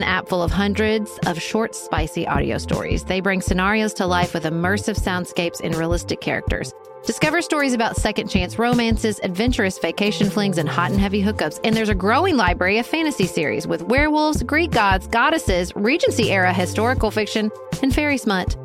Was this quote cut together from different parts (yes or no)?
no